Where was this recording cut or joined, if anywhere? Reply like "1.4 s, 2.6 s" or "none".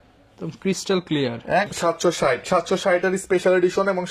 1.7 s